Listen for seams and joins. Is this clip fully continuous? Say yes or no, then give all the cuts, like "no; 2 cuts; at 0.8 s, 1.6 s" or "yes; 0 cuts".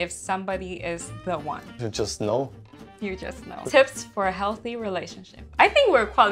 no; 2 cuts; at 1.7 s, 3.5 s